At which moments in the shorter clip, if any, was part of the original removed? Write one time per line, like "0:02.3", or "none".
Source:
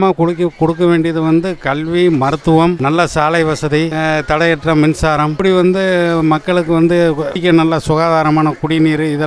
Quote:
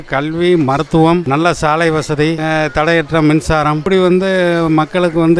none